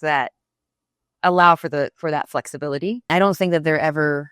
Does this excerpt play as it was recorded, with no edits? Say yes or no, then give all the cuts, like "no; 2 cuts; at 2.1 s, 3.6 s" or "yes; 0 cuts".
no; 1 cut; at 3.1 s